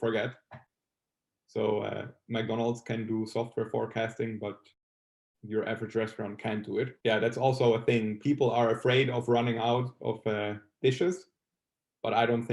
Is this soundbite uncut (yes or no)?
no